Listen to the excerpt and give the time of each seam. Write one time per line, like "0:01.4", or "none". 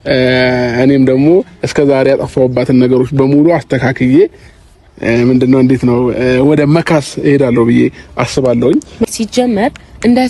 0:08.9